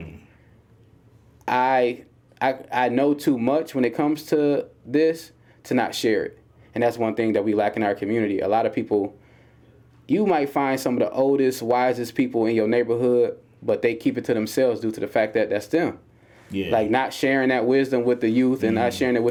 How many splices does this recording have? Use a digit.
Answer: 0